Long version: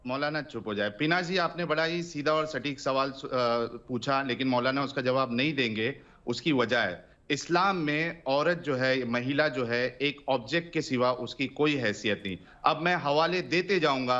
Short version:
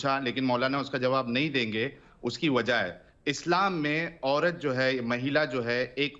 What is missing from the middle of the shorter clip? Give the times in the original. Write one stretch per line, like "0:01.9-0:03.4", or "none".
none